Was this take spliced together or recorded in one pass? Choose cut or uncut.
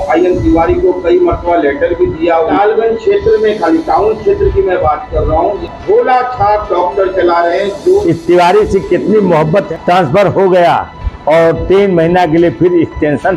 cut